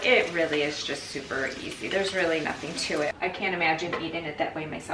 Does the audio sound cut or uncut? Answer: cut